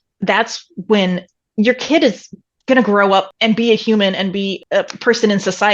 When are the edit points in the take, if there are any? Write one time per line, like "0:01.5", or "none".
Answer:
0:01.4
0:03.3
0:04.6